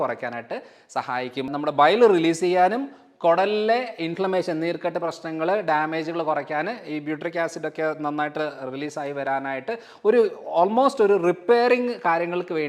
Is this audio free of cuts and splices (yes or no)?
no